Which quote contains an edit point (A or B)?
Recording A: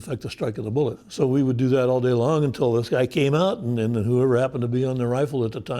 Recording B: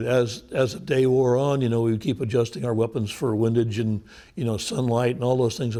A